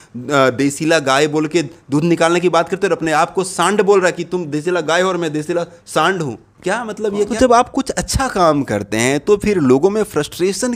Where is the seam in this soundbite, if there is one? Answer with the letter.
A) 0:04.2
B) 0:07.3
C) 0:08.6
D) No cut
B